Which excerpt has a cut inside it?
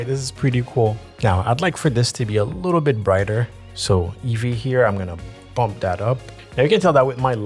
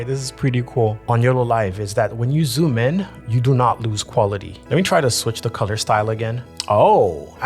second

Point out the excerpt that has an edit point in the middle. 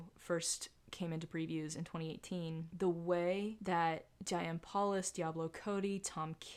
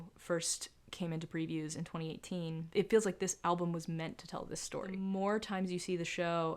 second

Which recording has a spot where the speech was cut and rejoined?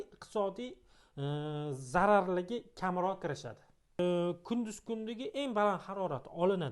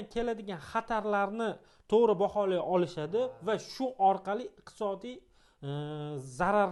first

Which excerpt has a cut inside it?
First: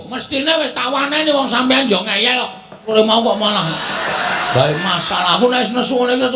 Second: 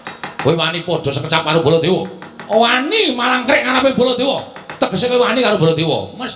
first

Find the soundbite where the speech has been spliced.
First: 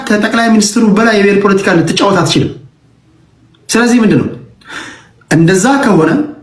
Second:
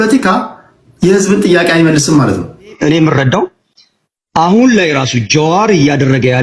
second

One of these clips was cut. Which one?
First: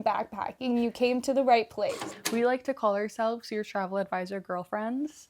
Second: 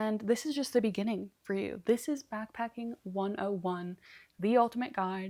first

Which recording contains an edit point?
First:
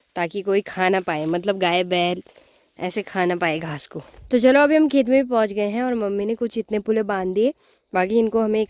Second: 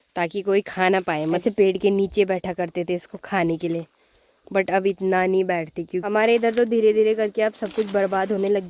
second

